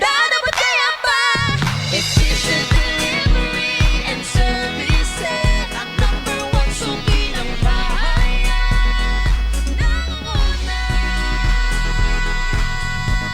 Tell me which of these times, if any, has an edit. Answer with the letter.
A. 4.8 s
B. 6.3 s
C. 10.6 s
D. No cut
D